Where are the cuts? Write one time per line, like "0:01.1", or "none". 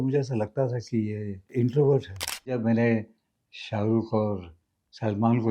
0:01.5
0:02.6